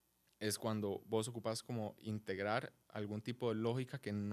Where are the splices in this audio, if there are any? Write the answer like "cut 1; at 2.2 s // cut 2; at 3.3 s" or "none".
none